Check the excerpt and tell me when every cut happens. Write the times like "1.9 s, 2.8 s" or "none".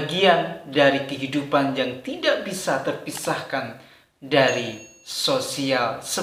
none